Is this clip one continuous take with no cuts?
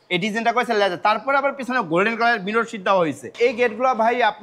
no; 1 cut; at 3.3 s

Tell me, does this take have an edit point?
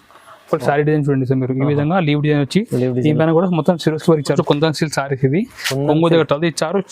yes; 1 cut; at 4.3 s

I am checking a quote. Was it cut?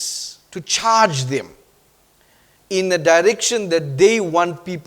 no; 0 cuts

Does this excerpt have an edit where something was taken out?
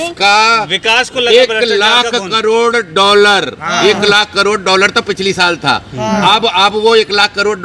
no; 0 cuts

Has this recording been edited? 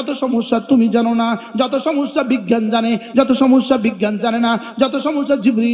no; 0 cuts

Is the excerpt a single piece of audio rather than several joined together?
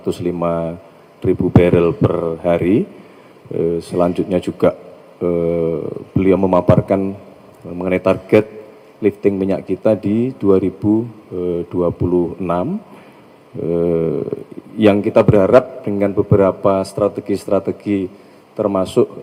yes; 0 cuts

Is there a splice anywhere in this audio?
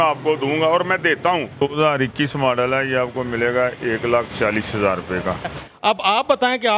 yes; 2 cuts; at 1.7 s, 5.6 s

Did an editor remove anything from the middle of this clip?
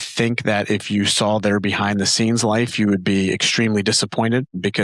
no; 0 cuts

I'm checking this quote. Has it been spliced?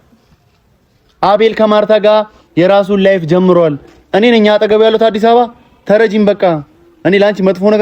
no; 0 cuts

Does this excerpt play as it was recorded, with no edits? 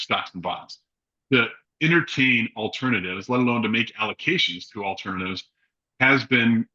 yes; 0 cuts

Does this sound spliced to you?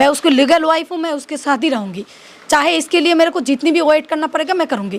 no; 0 cuts

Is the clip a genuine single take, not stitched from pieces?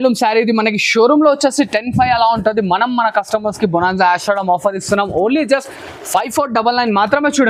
yes; 0 cuts

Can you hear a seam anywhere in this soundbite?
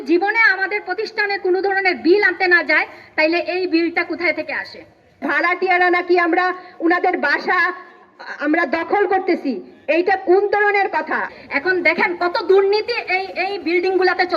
yes; 2 cuts; at 5.2 s, 11.3 s

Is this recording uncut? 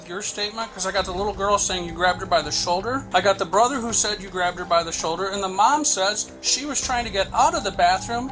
yes; 0 cuts

